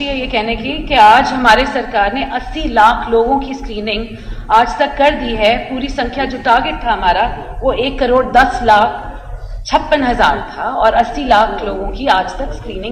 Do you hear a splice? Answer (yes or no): no